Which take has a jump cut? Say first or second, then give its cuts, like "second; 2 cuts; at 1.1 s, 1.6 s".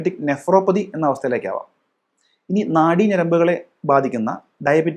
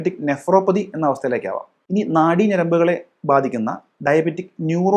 second; 1 cut; at 1.7 s